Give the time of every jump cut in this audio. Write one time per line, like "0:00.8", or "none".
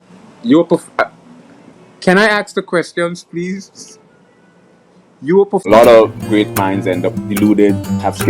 0:05.7